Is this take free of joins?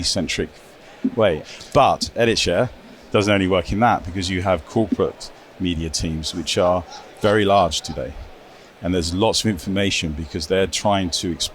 no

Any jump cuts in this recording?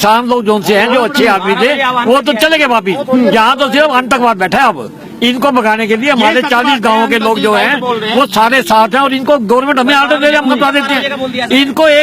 no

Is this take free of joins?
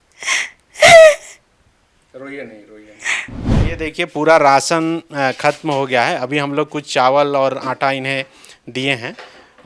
no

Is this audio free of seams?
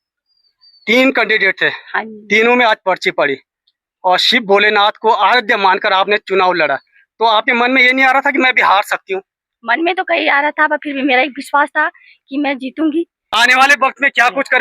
no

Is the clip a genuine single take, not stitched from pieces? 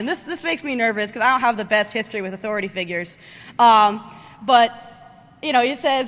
no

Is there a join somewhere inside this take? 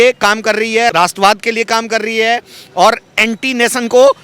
yes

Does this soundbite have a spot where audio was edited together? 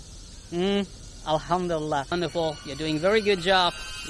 yes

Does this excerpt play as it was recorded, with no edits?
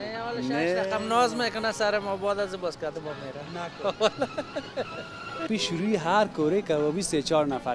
no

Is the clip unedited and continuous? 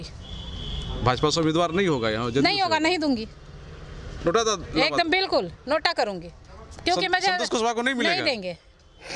yes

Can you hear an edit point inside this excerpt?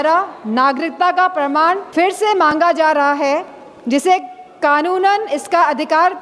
yes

